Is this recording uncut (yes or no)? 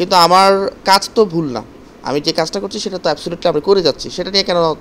yes